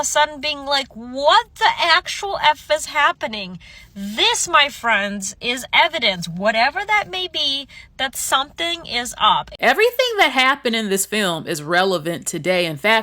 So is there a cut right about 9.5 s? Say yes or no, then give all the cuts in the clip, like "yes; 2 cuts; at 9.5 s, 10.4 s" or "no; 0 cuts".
yes; 1 cut; at 9.5 s